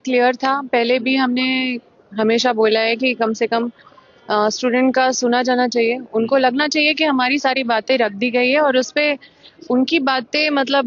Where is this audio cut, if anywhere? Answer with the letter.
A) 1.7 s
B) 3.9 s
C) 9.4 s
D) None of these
D